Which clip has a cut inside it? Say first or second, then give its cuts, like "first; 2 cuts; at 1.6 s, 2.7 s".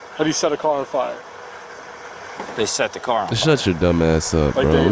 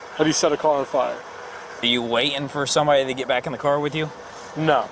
second; 1 cut; at 1.8 s